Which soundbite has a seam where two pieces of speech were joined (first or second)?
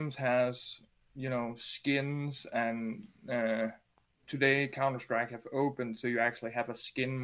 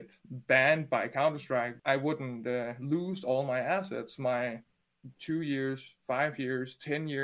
second